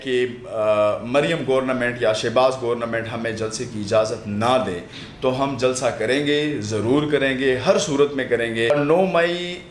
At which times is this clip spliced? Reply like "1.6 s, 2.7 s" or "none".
8.7 s